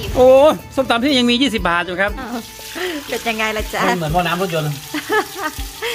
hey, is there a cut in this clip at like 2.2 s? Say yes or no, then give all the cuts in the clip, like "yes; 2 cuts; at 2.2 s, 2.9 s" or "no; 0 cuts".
yes; 1 cut; at 2.2 s